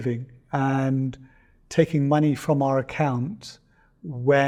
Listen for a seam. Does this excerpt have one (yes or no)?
no